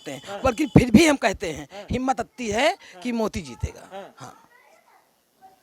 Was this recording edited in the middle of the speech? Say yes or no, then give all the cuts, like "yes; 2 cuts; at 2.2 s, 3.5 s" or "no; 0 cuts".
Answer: no; 0 cuts